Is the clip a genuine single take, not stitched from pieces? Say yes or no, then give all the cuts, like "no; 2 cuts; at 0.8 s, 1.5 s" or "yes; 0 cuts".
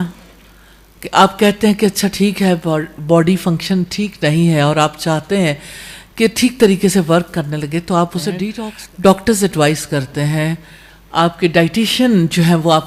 yes; 0 cuts